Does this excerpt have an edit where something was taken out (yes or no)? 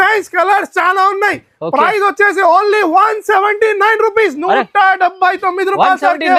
no